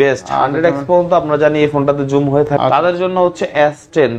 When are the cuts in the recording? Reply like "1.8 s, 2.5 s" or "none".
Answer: 2.5 s